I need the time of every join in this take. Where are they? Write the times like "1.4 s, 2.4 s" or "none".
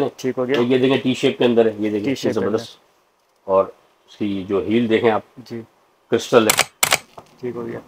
6.9 s